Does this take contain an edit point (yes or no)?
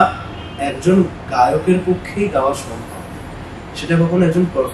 no